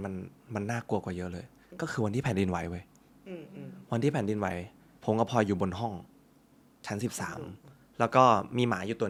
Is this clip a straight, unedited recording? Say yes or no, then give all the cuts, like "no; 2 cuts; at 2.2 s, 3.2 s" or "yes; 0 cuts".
yes; 0 cuts